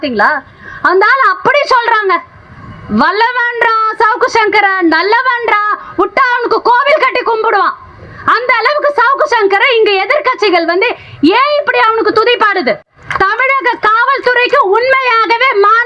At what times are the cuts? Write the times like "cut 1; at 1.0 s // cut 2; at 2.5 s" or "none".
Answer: cut 1; at 13.0 s